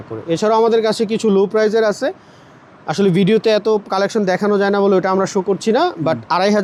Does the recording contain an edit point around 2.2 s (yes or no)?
no